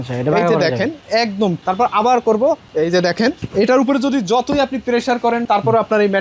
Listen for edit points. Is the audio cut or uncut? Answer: cut